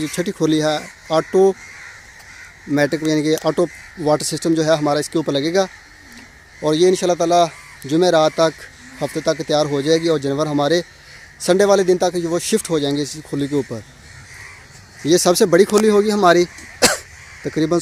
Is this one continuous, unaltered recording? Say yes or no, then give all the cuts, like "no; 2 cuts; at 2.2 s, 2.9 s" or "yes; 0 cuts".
yes; 0 cuts